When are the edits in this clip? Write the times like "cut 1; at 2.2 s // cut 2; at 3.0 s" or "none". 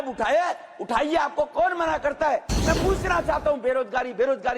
cut 1; at 2.5 s

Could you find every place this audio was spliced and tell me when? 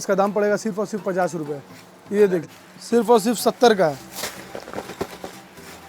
cut 1; at 2.5 s

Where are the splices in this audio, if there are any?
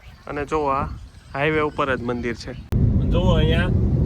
cut 1; at 2.7 s

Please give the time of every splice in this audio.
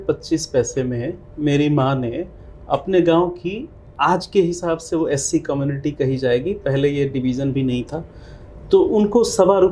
none

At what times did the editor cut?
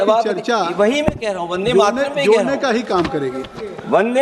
none

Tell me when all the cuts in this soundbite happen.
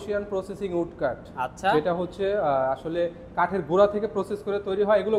none

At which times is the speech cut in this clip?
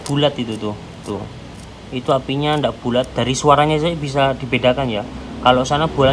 none

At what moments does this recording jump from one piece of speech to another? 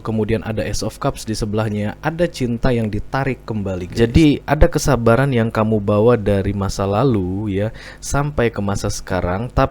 cut 1; at 3.9 s

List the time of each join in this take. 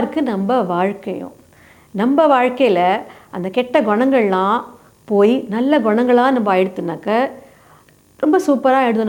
none

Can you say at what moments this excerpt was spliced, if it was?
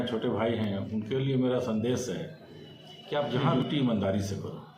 cut 1; at 3.5 s

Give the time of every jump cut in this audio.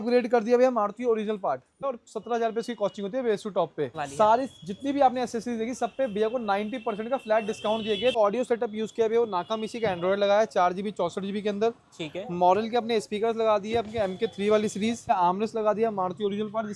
cut 1; at 1.8 s // cut 2; at 4.0 s // cut 3; at 8.2 s // cut 4; at 15.1 s

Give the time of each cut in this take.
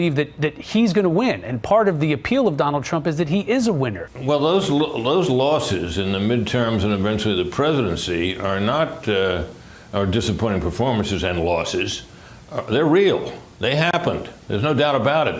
cut 1; at 4.1 s

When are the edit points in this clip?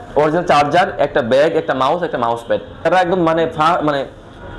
cut 1; at 2.9 s

